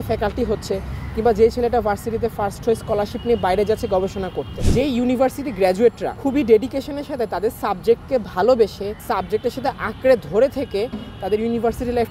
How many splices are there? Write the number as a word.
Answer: three